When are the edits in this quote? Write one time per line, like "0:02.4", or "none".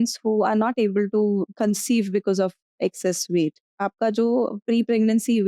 0:01.5
0:03.7

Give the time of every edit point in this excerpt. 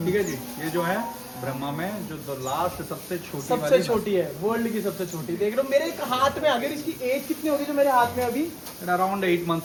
none

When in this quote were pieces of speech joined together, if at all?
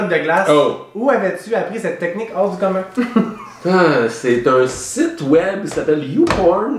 none

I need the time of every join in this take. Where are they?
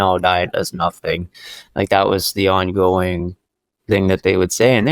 none

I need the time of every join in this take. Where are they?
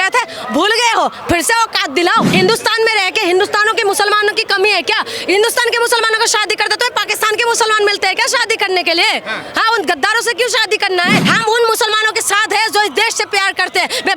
0:02.3
0:11.2

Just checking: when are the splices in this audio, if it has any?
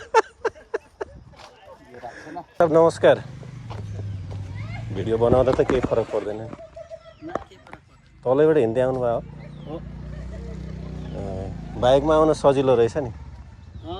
0:02.6

